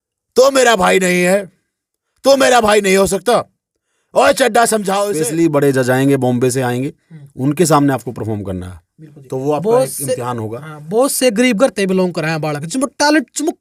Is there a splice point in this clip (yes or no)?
yes